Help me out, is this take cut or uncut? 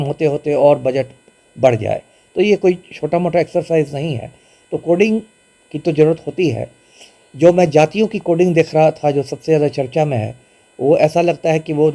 uncut